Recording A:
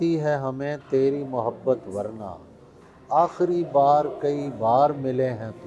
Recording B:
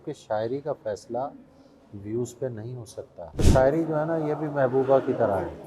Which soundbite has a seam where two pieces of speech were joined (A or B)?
B